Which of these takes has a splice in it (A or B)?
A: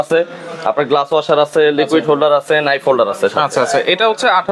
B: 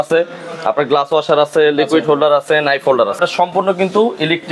B